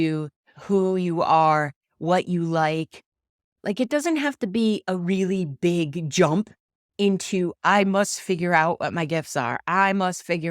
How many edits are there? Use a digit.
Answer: 1